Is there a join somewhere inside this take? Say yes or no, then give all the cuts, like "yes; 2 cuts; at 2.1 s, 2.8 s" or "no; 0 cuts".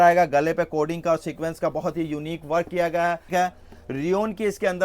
yes; 1 cut; at 3.3 s